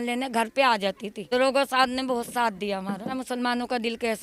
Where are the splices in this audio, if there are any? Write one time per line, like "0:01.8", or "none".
0:01.1
0:03.2